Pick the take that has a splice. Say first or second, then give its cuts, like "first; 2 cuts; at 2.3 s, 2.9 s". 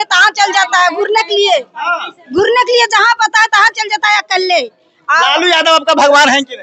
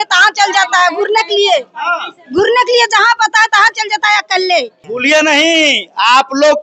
second; 1 cut; at 4.8 s